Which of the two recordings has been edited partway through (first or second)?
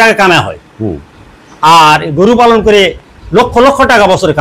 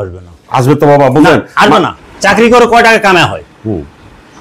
second